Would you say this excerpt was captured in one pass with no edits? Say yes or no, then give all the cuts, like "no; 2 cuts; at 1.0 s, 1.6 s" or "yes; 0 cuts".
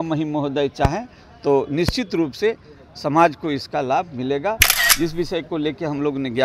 no; 1 cut; at 4.7 s